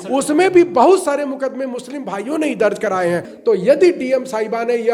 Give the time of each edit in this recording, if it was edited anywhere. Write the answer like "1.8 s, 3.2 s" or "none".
3.3 s